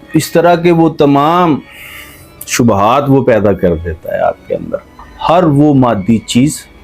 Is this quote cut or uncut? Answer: cut